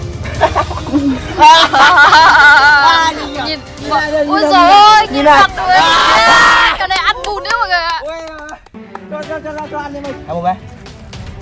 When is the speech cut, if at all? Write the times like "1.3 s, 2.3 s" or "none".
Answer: 10.2 s